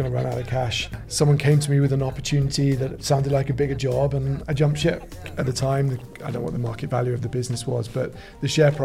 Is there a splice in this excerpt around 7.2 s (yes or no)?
no